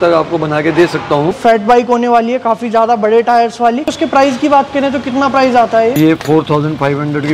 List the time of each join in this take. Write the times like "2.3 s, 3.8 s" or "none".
1.3 s, 3.8 s, 6.0 s